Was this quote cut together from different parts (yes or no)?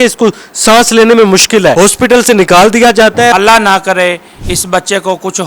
yes